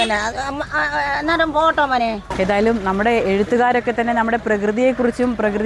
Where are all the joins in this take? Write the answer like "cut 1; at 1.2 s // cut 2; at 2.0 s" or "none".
cut 1; at 2.3 s